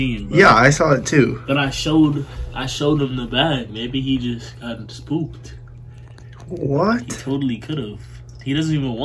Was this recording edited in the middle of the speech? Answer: no; 0 cuts

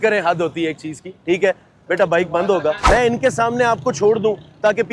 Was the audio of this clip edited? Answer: yes; 1 cut; at 2.8 s

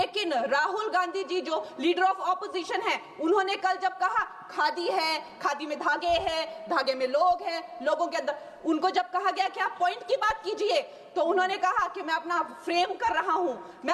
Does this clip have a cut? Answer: no; 0 cuts

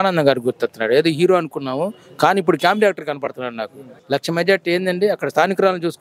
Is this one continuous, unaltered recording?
no; 1 cut; at 3.9 s

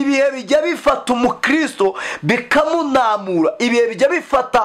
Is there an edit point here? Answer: no; 0 cuts

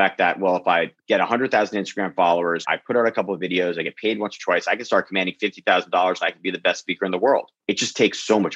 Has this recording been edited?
yes; 1 cut; at 2.6 s

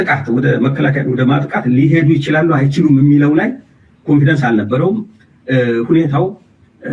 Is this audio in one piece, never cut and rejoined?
yes; 0 cuts

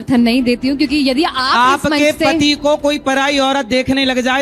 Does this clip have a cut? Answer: no; 0 cuts

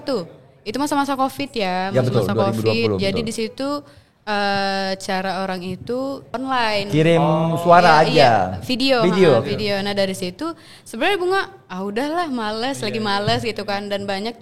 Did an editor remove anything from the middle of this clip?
yes; 1 cut; at 6.3 s

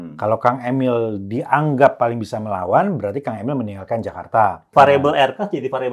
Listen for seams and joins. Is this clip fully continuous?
no; 1 cut; at 4.7 s

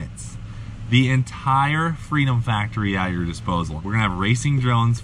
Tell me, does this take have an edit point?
yes; 1 cut; at 3.7 s

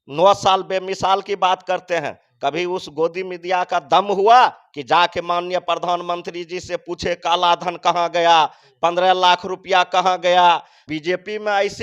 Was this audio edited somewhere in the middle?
yes; 1 cut; at 10.9 s

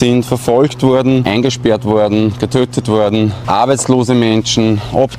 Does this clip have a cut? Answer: yes; 1 cut; at 1.2 s

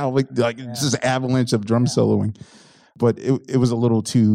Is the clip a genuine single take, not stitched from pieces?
no; 1 cut; at 2.9 s

